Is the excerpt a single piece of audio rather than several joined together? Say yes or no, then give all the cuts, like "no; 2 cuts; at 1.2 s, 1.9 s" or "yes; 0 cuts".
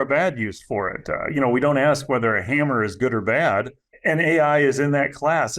no; 1 cut; at 3.8 s